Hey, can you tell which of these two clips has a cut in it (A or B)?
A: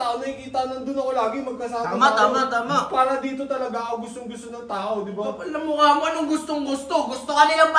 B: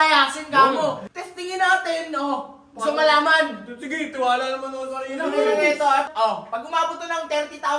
B